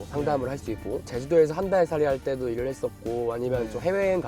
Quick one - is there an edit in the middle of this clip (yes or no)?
no